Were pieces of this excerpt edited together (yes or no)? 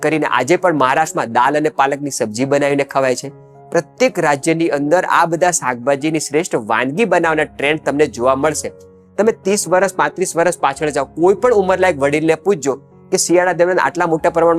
no